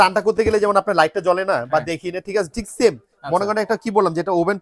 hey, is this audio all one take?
yes; 0 cuts

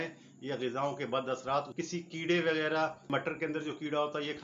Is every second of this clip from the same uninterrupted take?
no; 2 cuts; at 1.7 s, 3.1 s

